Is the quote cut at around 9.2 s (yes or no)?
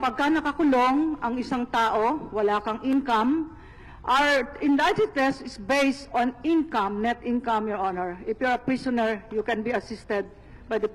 no